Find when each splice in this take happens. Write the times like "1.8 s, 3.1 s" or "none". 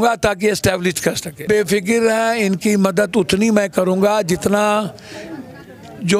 1.4 s